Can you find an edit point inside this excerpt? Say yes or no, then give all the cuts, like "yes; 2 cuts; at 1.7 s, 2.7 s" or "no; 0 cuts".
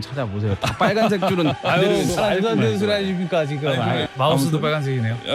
yes; 1 cut; at 4.1 s